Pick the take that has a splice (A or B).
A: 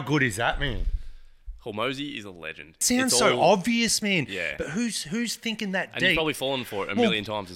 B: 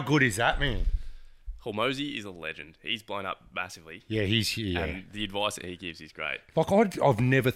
A